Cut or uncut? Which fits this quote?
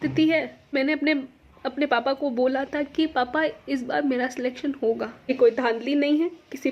cut